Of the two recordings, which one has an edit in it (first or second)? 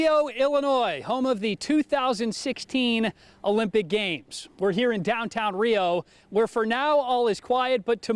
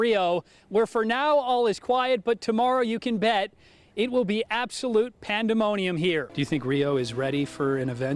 second